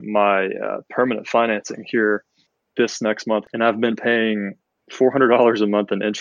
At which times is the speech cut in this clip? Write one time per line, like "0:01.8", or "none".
0:03.4